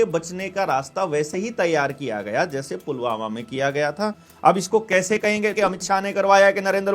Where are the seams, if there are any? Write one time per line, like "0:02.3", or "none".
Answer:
0:04.2
0:05.5